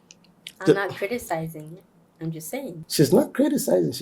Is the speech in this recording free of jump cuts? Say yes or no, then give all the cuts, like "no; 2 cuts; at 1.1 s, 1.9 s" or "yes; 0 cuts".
no; 1 cut; at 2.8 s